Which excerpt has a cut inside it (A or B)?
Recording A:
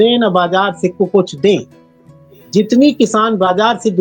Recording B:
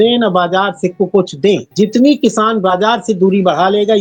B